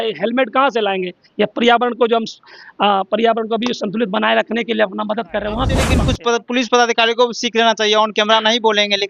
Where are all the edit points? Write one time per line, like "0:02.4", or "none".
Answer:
0:05.9